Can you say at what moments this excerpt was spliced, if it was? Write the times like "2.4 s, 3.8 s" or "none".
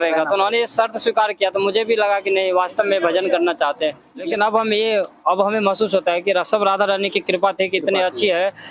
4.3 s